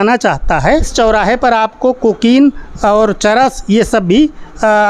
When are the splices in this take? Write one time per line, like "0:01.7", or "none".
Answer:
0:00.9